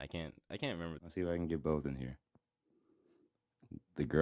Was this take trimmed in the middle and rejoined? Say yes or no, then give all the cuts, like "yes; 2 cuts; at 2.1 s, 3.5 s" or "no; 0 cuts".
yes; 1 cut; at 1.0 s